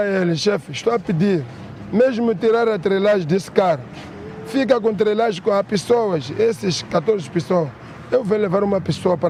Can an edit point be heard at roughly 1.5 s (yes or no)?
no